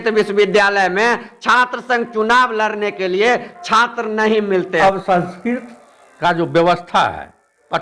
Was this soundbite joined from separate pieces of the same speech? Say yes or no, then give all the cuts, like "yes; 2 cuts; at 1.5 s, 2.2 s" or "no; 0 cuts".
yes; 1 cut; at 4.8 s